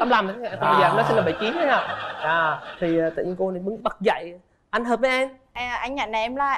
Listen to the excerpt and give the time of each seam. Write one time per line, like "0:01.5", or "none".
0:05.5